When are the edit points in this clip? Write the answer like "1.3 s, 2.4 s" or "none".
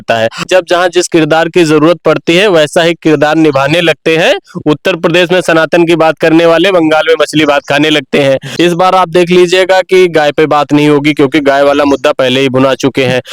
none

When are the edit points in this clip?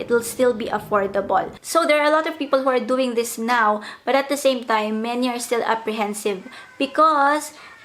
1.6 s

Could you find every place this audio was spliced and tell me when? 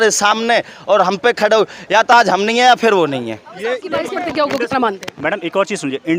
4.1 s

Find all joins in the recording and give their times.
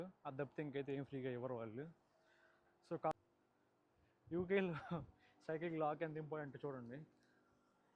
3.1 s

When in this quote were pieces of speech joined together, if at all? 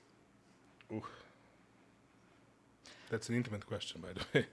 none

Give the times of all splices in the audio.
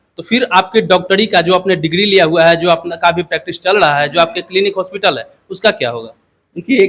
none

